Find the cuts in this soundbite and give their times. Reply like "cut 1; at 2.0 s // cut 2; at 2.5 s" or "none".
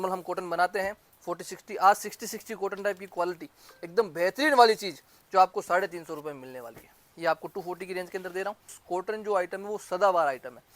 cut 1; at 8.8 s